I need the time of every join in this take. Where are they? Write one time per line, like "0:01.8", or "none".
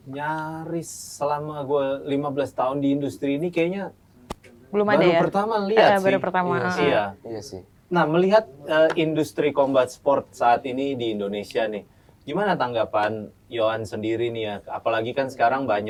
none